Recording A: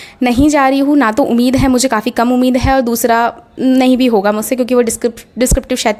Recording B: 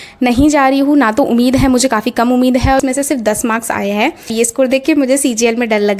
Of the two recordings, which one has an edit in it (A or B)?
B